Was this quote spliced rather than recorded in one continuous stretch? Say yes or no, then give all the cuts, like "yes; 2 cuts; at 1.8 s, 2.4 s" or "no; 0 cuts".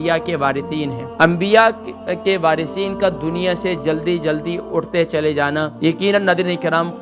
yes; 2 cuts; at 1.0 s, 5.7 s